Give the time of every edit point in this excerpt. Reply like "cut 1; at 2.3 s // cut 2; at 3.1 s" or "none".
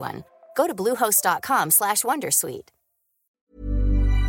cut 1; at 3.2 s